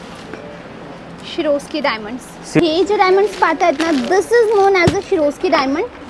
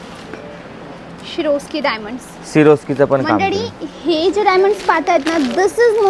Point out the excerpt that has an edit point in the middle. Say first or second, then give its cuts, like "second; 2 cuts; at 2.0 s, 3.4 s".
first; 1 cut; at 2.6 s